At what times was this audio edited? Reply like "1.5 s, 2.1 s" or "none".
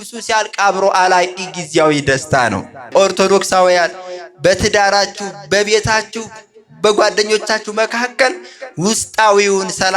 2.9 s